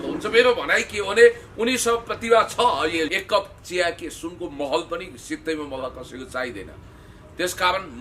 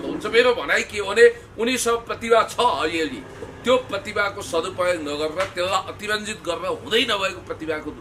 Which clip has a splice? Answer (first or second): first